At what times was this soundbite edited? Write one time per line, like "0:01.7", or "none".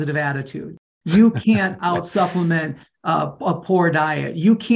none